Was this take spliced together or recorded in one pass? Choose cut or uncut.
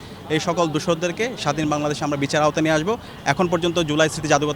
cut